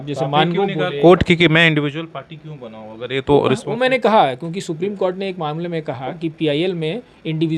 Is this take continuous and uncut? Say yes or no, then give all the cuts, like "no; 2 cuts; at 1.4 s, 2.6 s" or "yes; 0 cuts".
yes; 0 cuts